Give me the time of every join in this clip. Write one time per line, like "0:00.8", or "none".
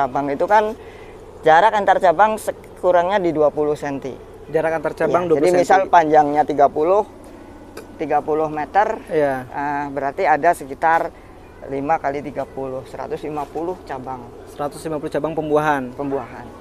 none

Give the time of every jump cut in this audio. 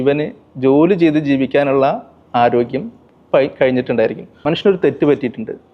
0:04.4

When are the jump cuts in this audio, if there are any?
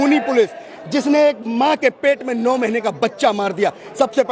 none

